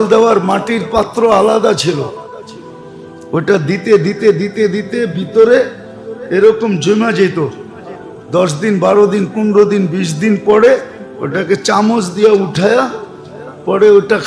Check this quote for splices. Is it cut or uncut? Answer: uncut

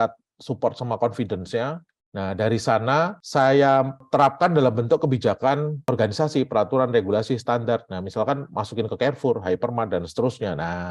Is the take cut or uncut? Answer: uncut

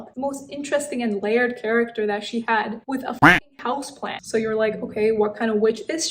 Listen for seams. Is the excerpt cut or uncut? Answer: cut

